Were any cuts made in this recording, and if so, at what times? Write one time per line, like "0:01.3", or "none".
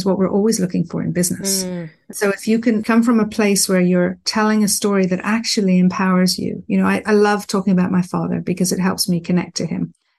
none